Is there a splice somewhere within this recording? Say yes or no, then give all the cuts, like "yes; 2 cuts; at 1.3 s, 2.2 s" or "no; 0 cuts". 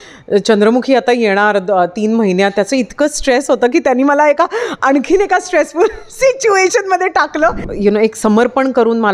yes; 1 cut; at 7.7 s